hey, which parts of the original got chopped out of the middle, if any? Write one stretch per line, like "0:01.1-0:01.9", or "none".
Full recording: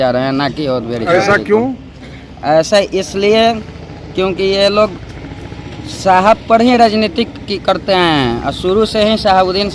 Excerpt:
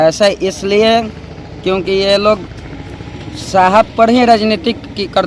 none